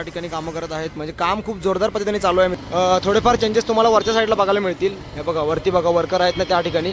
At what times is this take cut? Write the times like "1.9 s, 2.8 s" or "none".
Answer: 2.5 s